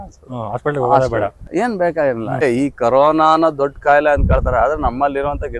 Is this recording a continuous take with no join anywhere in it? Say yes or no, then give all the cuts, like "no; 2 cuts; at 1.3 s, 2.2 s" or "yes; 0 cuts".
no; 1 cut; at 2.4 s